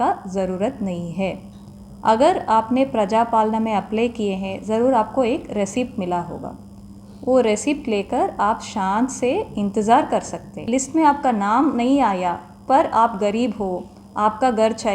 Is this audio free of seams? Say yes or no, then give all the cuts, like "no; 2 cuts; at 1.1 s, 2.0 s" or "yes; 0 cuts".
no; 1 cut; at 10.6 s